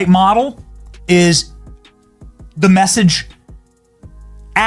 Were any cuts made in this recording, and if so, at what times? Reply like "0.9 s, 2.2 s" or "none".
none